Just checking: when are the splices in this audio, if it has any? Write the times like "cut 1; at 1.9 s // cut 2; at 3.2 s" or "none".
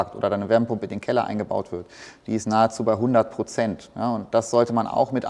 none